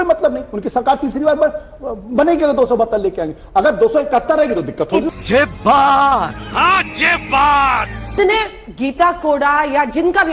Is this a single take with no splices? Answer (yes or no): yes